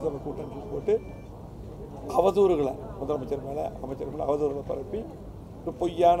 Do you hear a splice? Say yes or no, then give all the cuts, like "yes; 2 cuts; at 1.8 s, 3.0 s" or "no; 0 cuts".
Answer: no; 0 cuts